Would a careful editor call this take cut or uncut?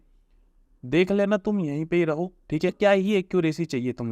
cut